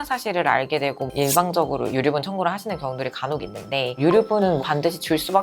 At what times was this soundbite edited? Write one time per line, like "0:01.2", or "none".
0:01.1
0:03.9